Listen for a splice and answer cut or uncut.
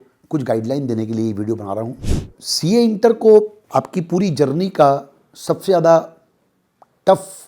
cut